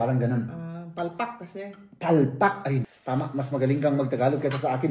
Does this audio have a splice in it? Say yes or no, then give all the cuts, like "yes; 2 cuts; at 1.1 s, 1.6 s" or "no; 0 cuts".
yes; 1 cut; at 2.9 s